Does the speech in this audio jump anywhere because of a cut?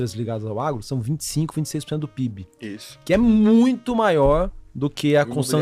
no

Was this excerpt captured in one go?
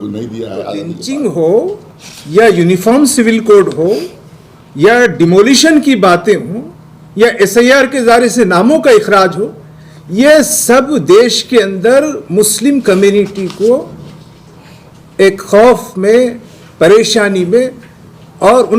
no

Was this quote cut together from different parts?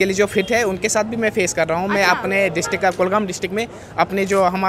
no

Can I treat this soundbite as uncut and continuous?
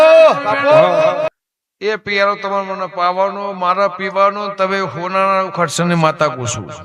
no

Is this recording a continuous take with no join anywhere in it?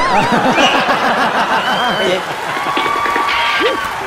yes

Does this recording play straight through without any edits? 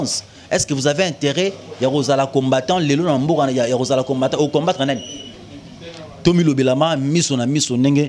yes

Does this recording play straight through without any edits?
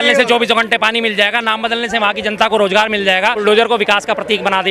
no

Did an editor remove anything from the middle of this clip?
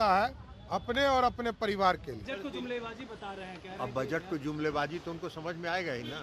yes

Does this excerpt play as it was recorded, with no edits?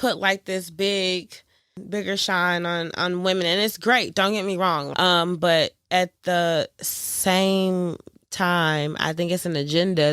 no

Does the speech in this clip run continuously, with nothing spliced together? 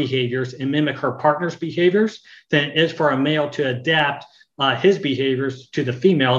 yes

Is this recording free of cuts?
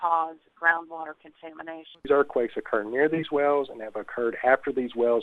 no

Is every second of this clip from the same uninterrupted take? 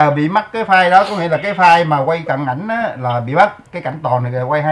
yes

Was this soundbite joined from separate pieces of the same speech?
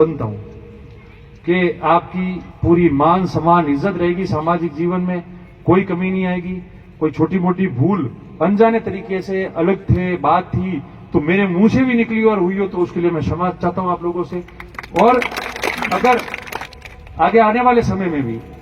no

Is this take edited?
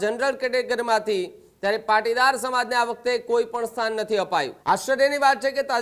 yes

